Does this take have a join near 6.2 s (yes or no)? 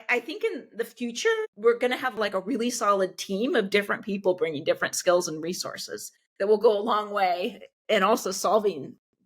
no